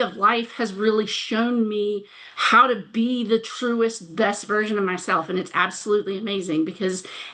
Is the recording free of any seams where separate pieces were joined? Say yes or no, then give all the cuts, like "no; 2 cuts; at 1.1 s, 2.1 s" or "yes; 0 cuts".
yes; 0 cuts